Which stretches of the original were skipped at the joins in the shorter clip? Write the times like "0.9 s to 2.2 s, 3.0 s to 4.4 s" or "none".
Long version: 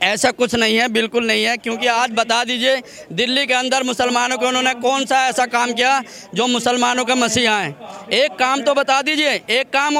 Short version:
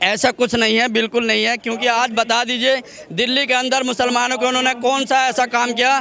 none